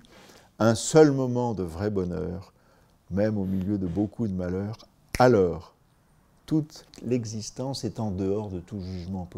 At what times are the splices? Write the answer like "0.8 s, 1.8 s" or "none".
6.9 s